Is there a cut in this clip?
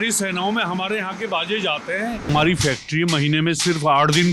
yes; 1 cut; at 2.3 s

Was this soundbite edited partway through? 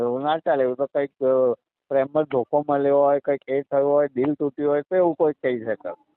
no; 0 cuts

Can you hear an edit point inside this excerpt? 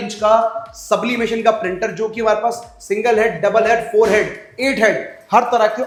no; 0 cuts

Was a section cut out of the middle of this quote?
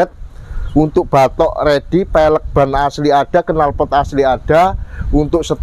no; 0 cuts

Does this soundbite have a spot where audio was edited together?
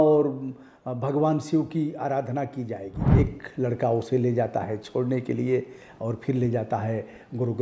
yes; 1 cut; at 3.1 s

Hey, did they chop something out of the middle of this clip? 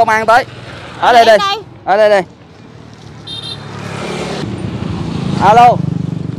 yes; 1 cut; at 4.4 s

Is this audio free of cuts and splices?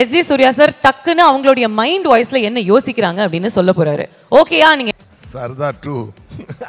no; 1 cut; at 4.9 s

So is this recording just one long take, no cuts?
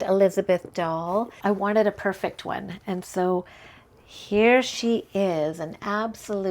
no; 1 cut; at 1.3 s

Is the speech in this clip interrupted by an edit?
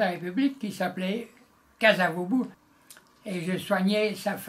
yes; 1 cut; at 2.6 s

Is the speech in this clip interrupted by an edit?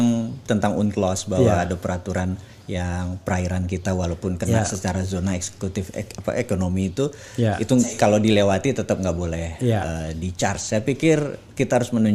no; 0 cuts

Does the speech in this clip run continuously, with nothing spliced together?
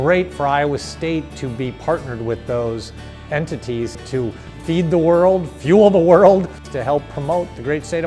no; 2 cuts; at 4.0 s, 6.7 s

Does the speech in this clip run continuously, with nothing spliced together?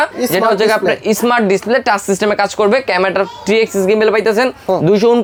yes; 0 cuts

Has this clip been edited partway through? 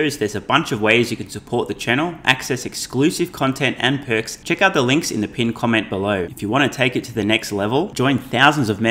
yes; 2 cuts; at 4.4 s, 6.3 s

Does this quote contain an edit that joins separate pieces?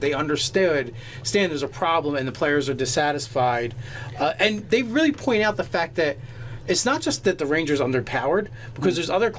yes; 1 cut; at 2.9 s

